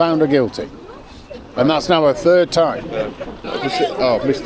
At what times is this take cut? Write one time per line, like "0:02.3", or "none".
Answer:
0:03.5